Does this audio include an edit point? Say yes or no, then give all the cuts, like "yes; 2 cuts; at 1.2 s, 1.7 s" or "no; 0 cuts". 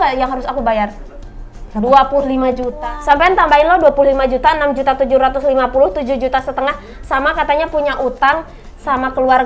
yes; 1 cut; at 2.7 s